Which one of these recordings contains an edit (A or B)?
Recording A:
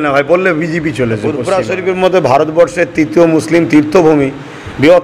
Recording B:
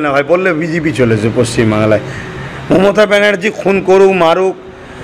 A